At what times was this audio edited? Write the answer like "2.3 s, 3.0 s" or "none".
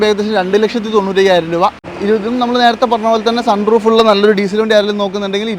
1.8 s